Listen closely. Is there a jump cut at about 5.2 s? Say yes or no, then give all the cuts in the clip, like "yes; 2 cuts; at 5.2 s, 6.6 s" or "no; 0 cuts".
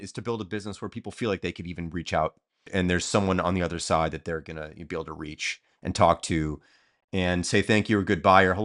no; 1 cut; at 2.7 s